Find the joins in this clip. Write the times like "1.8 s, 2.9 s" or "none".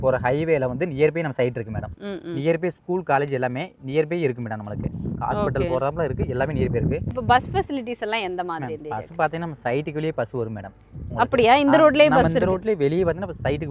1.9 s, 7.1 s